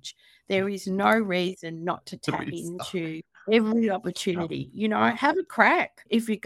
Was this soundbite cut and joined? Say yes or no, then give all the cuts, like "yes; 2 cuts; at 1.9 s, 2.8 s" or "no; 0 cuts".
no; 0 cuts